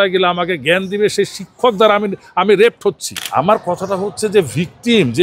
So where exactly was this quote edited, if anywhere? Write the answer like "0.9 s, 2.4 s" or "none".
3.1 s

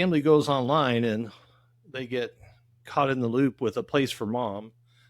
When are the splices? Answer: none

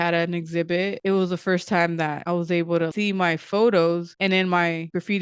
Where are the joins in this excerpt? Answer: 1.0 s, 2.9 s, 4.1 s

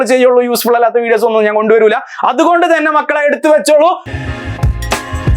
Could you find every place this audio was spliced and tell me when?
4.1 s

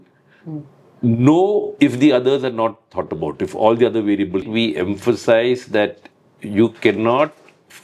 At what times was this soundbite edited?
4.4 s

